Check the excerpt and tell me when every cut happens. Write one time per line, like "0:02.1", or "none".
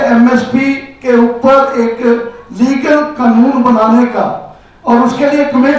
none

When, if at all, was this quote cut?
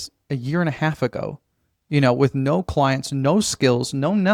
none

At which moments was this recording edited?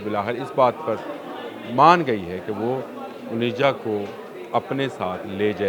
none

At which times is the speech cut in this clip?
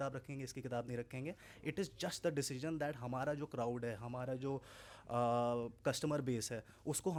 none

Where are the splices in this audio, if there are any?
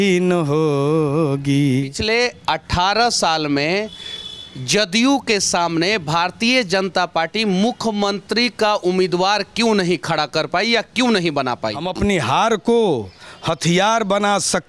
0:01.9
0:11.8

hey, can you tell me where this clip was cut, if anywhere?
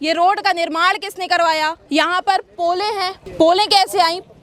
0:01.8
0:03.2

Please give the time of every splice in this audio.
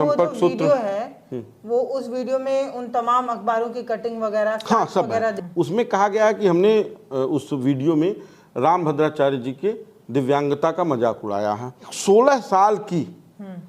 0:05.4
0:12.0

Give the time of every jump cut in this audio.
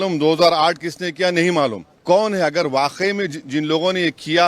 0:01.9

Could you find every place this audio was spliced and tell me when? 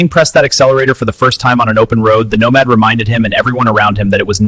none

